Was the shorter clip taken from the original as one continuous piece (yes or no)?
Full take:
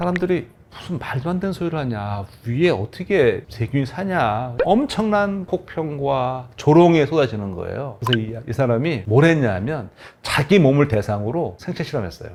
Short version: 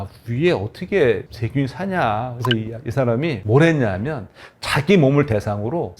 no